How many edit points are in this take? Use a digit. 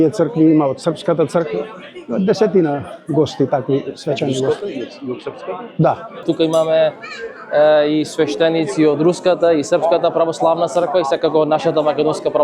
1